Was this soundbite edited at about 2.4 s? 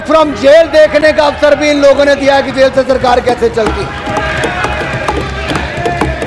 no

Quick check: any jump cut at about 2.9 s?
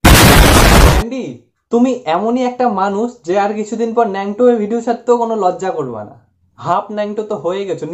no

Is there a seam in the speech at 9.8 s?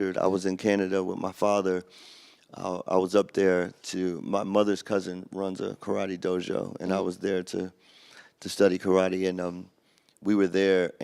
no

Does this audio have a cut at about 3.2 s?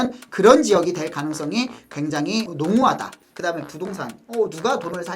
yes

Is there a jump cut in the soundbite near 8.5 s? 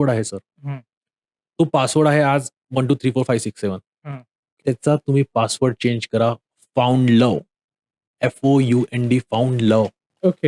no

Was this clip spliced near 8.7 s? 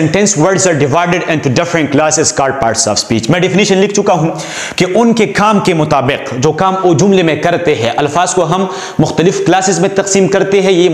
no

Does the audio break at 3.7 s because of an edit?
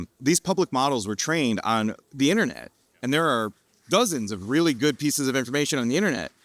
no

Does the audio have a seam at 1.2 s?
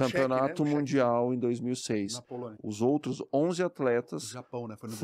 no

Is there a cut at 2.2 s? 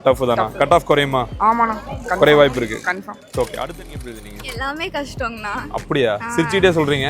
no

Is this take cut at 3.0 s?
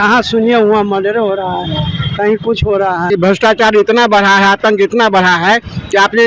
yes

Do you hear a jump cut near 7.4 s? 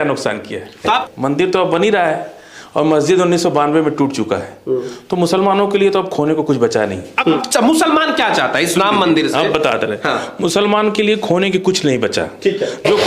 yes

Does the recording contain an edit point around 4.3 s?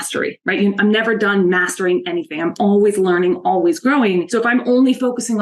yes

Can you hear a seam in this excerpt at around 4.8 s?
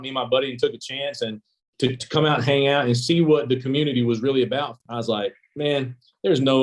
yes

